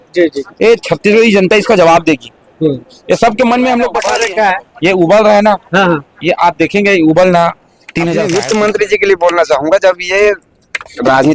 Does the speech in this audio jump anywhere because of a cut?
yes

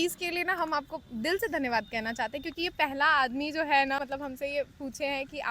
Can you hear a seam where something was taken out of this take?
yes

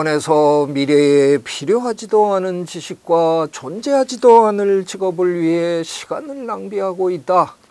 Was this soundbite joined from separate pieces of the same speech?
no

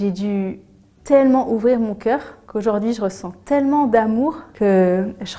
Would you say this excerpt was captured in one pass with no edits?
no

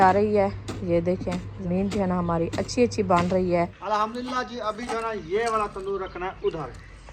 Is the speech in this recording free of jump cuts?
no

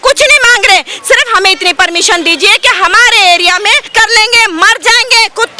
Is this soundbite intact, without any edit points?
no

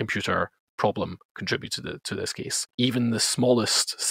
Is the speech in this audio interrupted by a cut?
yes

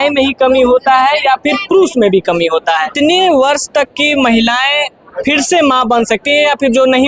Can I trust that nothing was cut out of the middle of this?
no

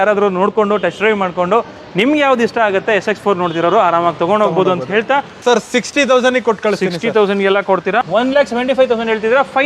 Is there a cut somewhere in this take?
yes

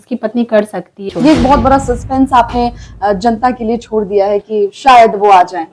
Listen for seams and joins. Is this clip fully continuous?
no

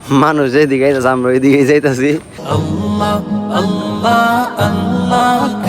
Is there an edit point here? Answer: yes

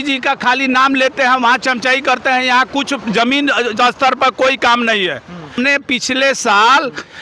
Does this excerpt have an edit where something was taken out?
yes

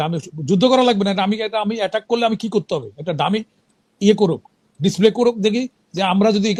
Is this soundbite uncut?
yes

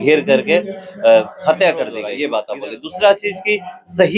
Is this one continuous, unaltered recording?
yes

